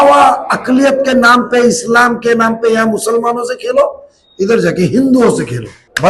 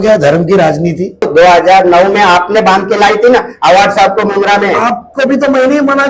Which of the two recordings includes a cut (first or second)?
second